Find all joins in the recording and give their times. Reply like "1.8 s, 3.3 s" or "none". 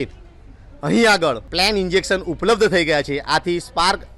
1.5 s